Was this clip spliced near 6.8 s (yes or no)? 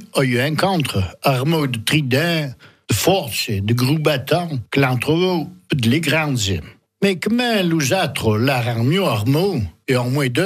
yes